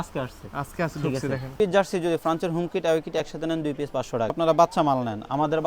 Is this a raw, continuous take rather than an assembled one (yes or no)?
no